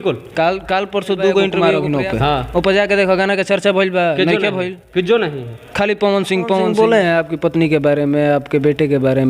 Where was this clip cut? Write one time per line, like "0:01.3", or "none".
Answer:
0:01.6
0:06.7